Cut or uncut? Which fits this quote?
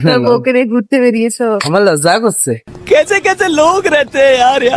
cut